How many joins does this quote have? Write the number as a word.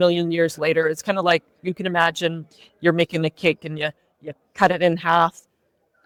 zero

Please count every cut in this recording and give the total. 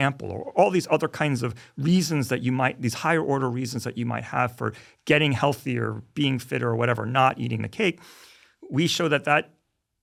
zero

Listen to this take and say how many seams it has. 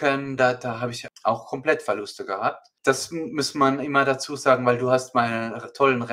two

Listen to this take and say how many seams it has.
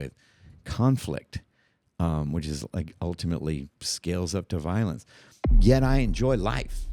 one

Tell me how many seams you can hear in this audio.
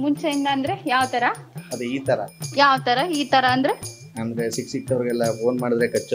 zero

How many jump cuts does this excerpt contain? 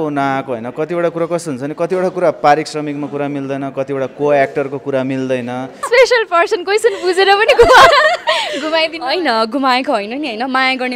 one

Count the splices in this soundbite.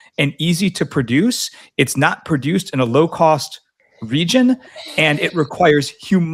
zero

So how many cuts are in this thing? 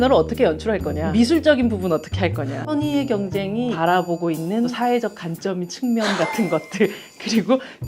four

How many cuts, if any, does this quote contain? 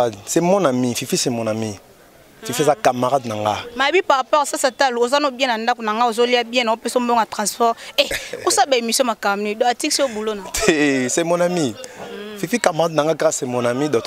zero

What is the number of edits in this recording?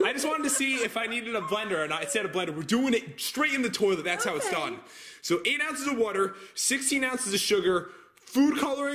one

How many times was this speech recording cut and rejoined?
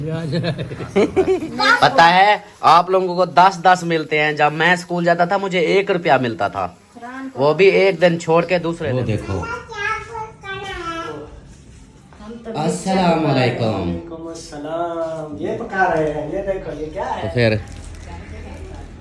three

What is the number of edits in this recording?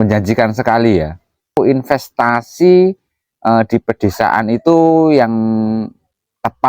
one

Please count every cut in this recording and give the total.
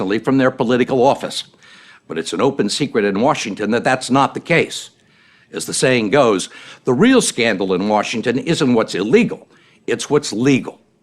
one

